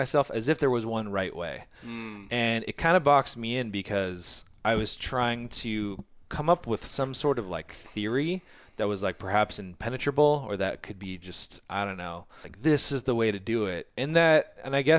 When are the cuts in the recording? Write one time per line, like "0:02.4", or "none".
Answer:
0:12.4